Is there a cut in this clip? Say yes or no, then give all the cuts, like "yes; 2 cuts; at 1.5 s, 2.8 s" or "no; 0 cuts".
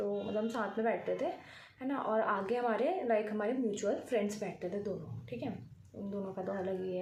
no; 0 cuts